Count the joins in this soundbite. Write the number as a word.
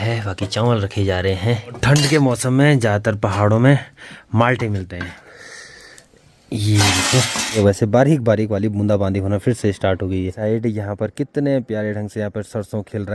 four